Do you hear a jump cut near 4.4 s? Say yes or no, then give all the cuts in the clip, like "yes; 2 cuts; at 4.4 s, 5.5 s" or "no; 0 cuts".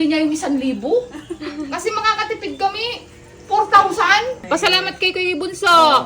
yes; 1 cut; at 4.4 s